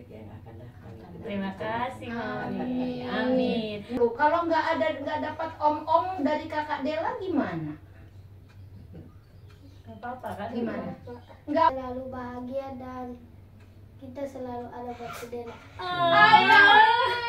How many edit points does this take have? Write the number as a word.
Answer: two